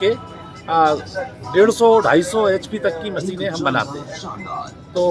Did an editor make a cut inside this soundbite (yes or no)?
no